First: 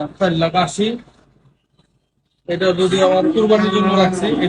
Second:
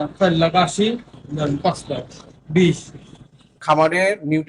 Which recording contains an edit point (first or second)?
second